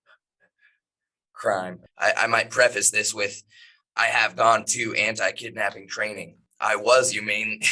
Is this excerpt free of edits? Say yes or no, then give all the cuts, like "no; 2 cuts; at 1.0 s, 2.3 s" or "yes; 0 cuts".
no; 2 cuts; at 1.8 s, 6.4 s